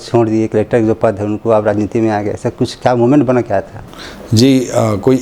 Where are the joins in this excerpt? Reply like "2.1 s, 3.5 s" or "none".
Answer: none